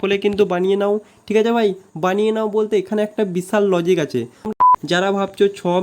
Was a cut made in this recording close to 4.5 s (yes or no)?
yes